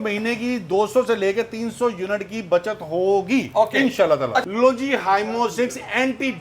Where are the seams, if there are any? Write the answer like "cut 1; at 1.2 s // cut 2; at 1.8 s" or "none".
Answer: cut 1; at 4.4 s